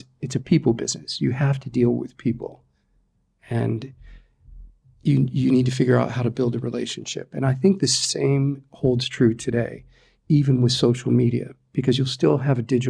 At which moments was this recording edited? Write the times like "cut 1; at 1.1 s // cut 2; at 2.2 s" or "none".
none